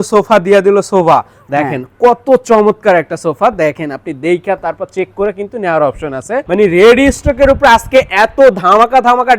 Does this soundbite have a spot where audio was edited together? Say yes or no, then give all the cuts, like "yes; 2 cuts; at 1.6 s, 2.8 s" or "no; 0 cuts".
yes; 1 cut; at 6.3 s